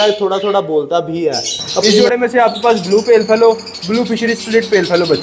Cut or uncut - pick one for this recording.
cut